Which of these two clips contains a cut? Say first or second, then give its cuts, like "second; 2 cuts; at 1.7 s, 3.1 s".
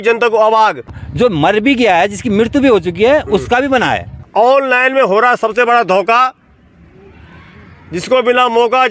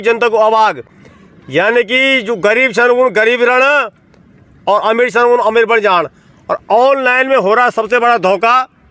first; 2 cuts; at 1.0 s, 4.2 s